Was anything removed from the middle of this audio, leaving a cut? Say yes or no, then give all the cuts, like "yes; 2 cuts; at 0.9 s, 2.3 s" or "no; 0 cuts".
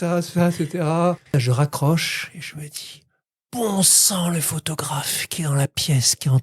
yes; 1 cut; at 1.3 s